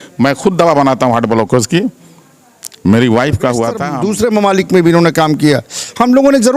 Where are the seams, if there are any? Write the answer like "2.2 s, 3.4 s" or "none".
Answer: 3.9 s